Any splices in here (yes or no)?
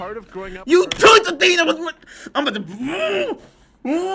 no